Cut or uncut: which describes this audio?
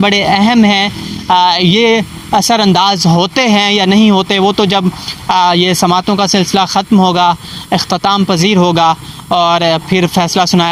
uncut